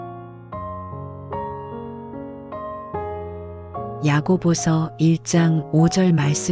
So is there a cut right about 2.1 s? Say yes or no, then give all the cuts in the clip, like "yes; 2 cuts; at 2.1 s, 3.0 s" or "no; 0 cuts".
no; 1 cut; at 4.0 s